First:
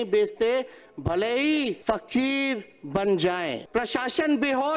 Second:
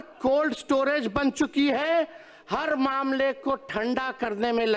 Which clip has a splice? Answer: first; 2 cuts; at 1.8 s, 3.6 s

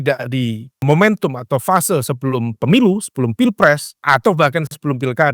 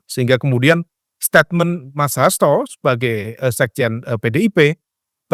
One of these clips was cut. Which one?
first; 2 cuts; at 0.8 s, 4.0 s

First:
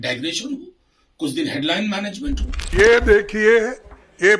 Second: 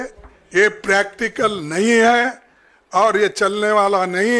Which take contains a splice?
first; 1 cut; at 2.7 s

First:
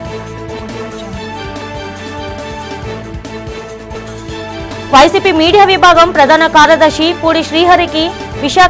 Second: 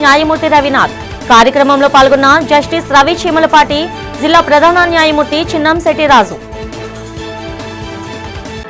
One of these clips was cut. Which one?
first; 1 cut; at 1.2 s

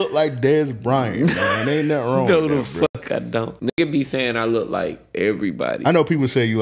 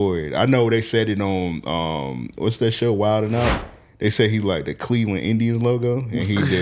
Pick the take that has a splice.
first; 1 cut; at 3.6 s

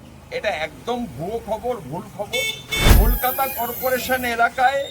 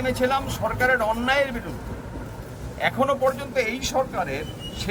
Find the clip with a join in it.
first; 1 cut; at 2.8 s

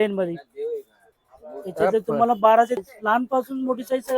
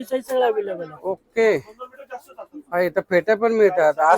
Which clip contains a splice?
first; 1 cut; at 2.8 s

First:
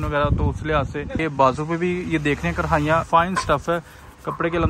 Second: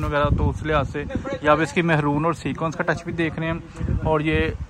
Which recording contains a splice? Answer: first; 2 cuts; at 1.2 s, 3.0 s

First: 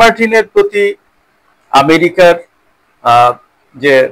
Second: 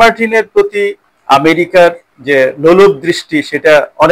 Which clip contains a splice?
second; 2 cuts; at 1.1 s, 2.1 s

